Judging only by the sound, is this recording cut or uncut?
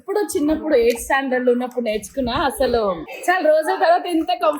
cut